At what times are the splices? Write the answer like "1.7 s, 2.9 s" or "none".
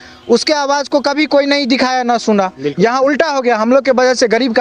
none